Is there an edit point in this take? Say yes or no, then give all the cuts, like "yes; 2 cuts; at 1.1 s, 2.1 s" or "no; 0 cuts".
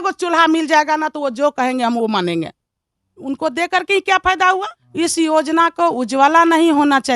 yes; 1 cut; at 4.8 s